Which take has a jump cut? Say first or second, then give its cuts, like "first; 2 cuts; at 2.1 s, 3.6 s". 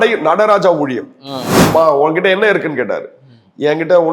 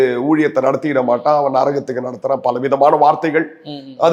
first; 1 cut; at 1.7 s